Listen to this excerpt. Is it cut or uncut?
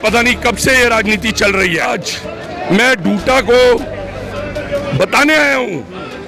cut